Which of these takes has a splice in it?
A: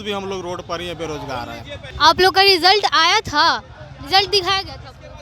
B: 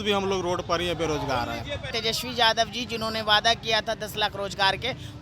B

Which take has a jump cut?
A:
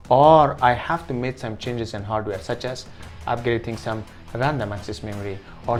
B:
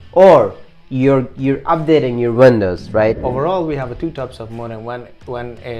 B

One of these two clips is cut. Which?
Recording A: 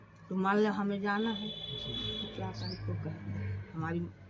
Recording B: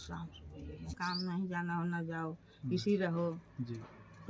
B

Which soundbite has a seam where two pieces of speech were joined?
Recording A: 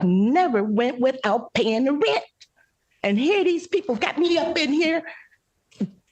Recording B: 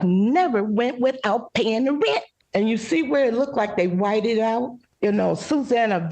B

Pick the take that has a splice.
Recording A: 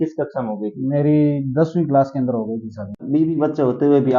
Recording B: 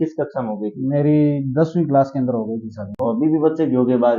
A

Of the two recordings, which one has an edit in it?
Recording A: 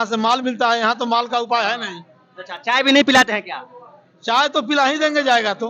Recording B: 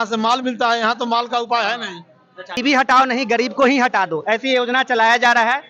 B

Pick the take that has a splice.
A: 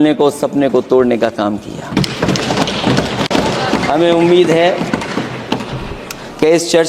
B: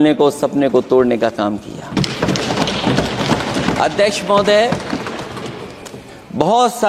A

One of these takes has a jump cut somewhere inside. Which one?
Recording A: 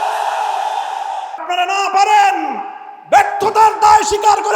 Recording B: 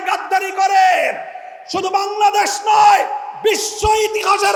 A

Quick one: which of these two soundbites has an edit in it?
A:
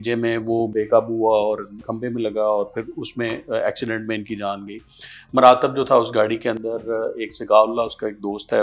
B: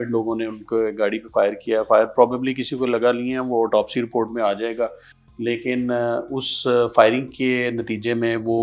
A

